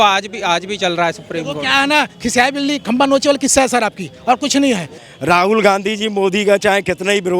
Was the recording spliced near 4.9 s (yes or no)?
yes